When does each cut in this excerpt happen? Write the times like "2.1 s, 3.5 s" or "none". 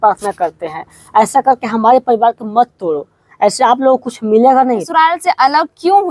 4.9 s